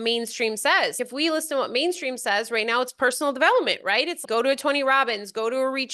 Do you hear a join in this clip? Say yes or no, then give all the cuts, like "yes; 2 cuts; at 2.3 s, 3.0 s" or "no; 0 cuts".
yes; 2 cuts; at 1.0 s, 4.2 s